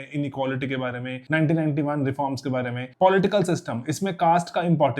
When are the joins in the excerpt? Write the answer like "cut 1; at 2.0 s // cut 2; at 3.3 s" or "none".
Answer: cut 1; at 1.1 s // cut 2; at 2.8 s